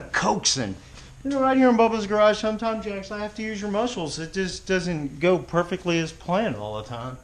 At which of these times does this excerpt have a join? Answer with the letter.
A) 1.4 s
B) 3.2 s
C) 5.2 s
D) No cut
D